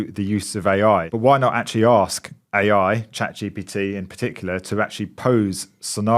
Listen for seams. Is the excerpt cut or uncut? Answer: cut